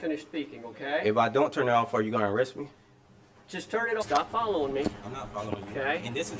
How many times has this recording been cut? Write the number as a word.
two